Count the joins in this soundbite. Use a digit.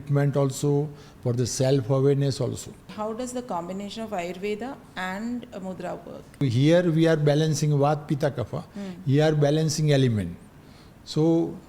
2